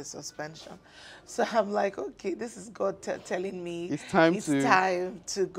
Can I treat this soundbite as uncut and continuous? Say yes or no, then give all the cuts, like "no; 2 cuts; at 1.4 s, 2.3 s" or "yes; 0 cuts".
yes; 0 cuts